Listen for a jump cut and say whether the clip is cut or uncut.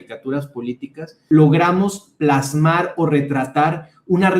cut